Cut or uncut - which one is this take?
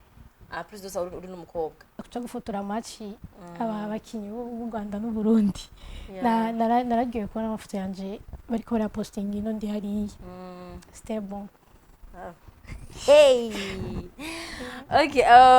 cut